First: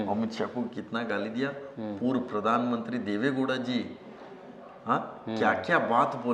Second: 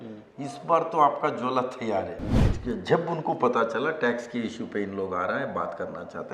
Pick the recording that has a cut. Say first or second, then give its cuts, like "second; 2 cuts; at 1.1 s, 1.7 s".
second; 1 cut; at 2.4 s